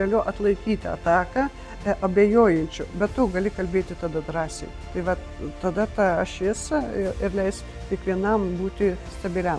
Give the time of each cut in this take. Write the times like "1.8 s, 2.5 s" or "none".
none

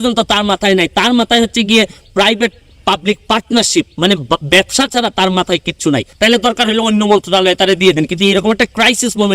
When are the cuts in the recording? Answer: 6.1 s

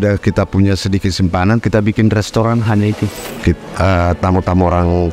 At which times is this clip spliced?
3.3 s

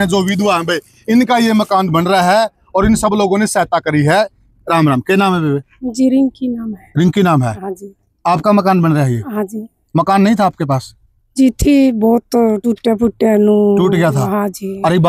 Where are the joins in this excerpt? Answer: none

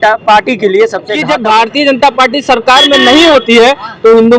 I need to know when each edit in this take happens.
1.1 s

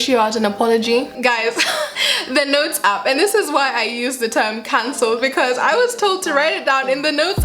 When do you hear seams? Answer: 1.1 s, 2.1 s

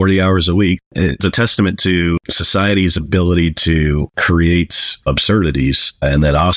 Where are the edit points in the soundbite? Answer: 0.8 s, 2.3 s, 4.1 s

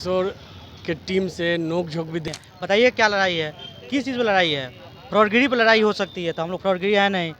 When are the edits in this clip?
2.2 s

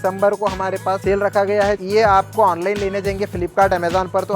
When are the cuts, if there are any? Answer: 1.0 s, 1.8 s

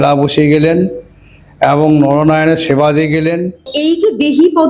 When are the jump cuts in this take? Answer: 3.4 s

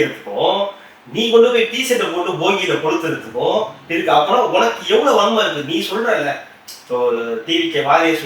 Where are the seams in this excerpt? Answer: none

